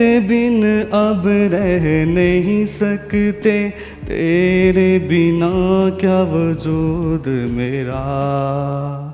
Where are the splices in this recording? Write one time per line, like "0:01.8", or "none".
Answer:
none